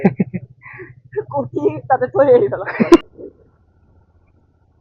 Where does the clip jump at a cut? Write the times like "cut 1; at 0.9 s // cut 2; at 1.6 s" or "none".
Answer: cut 1; at 3.0 s

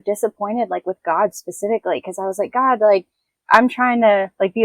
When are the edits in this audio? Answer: cut 1; at 3.3 s

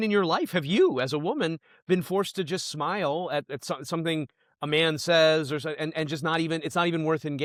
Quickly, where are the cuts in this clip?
none

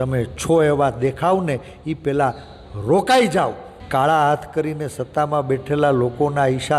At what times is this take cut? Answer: cut 1; at 3.7 s

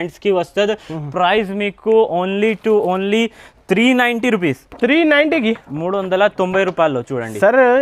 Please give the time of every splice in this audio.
none

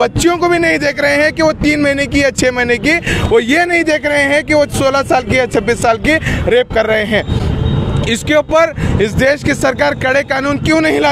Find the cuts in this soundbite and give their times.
none

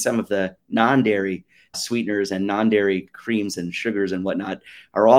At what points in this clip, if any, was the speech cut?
cut 1; at 1.7 s // cut 2; at 3.1 s

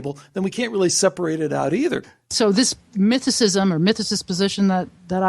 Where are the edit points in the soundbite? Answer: cut 1; at 2.1 s

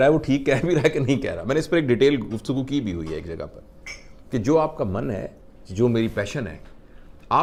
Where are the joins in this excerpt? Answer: none

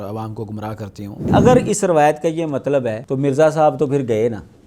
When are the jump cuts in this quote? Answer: cut 1; at 1.2 s // cut 2; at 3.0 s

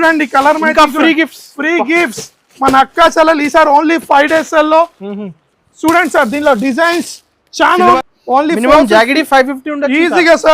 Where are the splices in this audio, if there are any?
cut 1; at 8.0 s

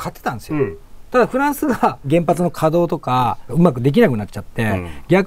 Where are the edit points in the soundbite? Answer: cut 1; at 2.0 s // cut 2; at 3.5 s

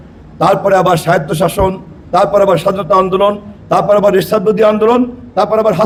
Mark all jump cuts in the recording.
none

